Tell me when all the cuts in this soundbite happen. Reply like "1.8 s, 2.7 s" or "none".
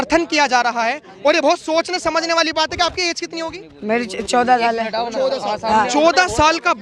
none